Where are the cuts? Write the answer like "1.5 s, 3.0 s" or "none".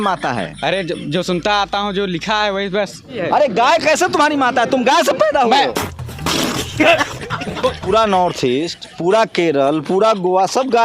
3.2 s, 5.7 s, 7.8 s